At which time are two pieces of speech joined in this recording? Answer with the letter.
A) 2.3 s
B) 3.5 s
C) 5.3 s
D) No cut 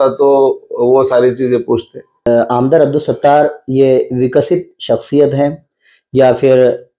A